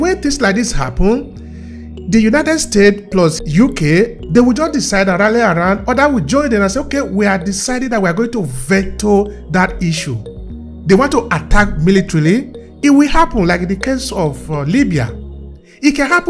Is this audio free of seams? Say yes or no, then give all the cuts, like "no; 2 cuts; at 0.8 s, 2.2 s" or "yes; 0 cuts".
no; 1 cut; at 3.4 s